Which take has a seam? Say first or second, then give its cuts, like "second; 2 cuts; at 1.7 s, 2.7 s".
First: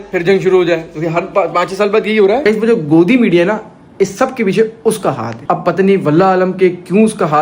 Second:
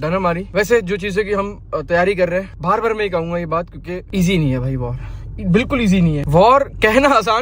first; 1 cut; at 2.4 s